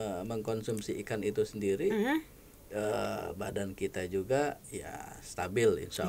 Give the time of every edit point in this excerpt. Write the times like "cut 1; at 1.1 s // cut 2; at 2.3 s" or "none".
none

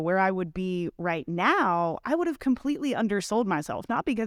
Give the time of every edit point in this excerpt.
none

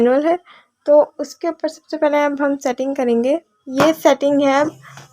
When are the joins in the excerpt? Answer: cut 1; at 3.6 s

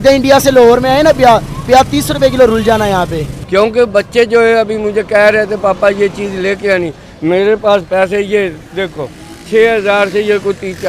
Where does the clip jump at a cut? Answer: cut 1; at 3.3 s

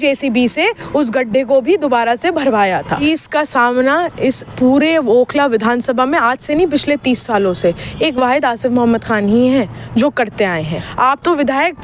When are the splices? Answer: cut 1; at 3.0 s // cut 2; at 10.9 s

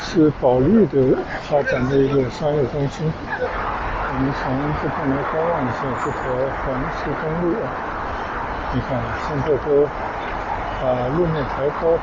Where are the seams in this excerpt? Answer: cut 1; at 3.5 s

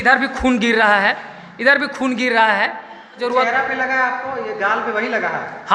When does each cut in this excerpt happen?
cut 1; at 3.2 s

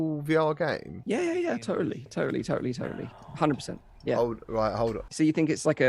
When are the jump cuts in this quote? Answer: cut 1; at 0.9 s // cut 2; at 5.0 s

